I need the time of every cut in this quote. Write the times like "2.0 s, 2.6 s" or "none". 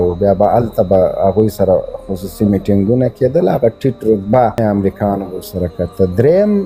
4.6 s